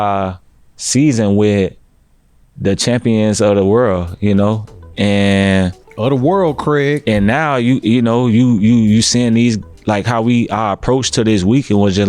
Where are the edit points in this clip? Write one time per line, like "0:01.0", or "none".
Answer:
none

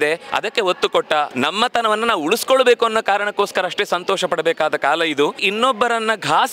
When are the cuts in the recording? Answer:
0:01.3
0:05.4

